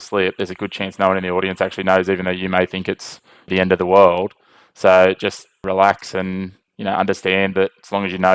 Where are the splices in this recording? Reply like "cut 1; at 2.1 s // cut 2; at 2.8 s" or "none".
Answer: cut 1; at 3.5 s // cut 2; at 5.6 s